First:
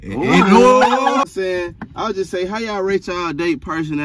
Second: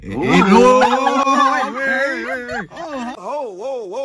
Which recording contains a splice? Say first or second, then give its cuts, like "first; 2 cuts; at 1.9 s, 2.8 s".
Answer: first; 1 cut; at 1.2 s